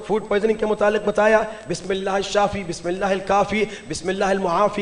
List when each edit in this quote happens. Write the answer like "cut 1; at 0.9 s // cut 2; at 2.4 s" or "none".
none

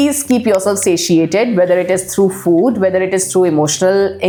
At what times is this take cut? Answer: none

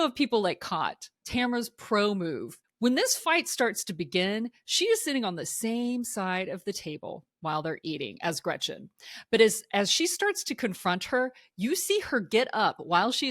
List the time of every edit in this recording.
cut 1; at 1.2 s // cut 2; at 2.5 s

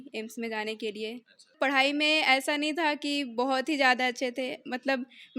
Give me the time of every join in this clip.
cut 1; at 1.5 s

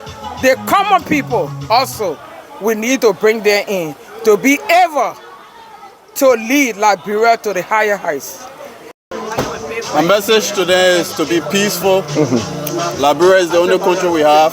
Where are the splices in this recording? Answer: cut 1; at 9.1 s

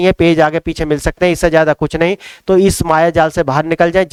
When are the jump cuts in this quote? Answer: none

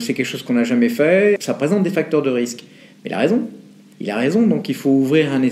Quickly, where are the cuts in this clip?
cut 1; at 1.4 s

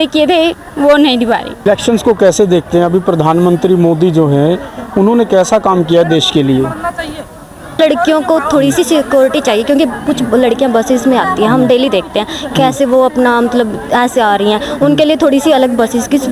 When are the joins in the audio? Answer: cut 1; at 1.6 s // cut 2; at 7.8 s

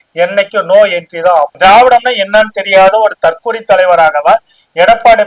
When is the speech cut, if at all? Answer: cut 1; at 1.5 s

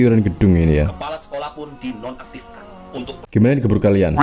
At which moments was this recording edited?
cut 1; at 3.2 s

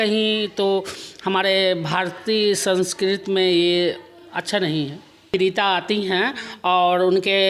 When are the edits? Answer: cut 1; at 5.3 s

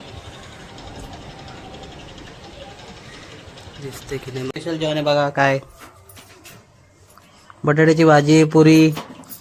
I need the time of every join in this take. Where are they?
cut 1; at 4.5 s

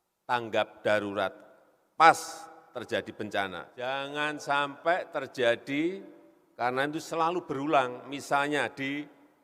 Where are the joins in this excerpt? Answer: cut 1; at 3.8 s

